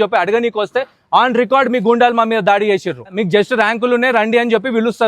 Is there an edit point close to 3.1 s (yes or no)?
yes